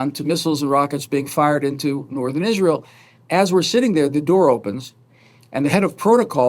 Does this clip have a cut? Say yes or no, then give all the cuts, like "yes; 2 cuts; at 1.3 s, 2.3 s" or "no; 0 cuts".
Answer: no; 0 cuts